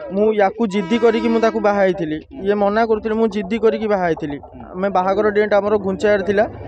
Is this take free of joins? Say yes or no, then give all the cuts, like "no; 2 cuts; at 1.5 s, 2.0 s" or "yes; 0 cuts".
yes; 0 cuts